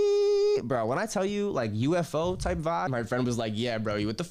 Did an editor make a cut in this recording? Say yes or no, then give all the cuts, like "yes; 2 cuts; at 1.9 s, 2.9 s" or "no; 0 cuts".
yes; 1 cut; at 2.9 s